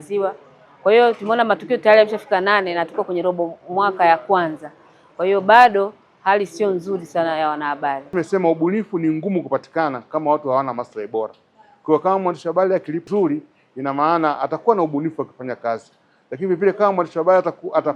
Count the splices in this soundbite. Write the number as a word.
two